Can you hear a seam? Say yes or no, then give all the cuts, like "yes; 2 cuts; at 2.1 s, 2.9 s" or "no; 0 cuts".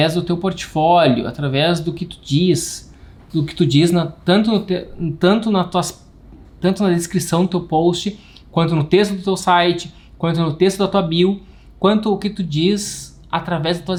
no; 0 cuts